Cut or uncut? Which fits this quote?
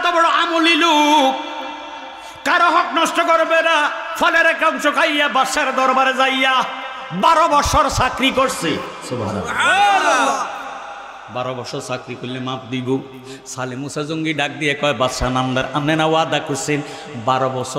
uncut